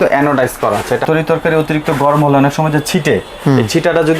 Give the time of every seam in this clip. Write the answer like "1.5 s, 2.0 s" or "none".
1.0 s